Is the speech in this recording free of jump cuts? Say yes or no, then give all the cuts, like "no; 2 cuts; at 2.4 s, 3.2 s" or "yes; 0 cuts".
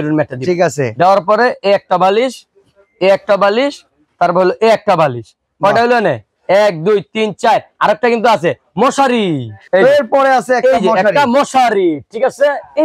yes; 0 cuts